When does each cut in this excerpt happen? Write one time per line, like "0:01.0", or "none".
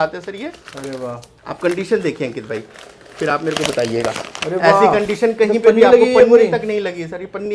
none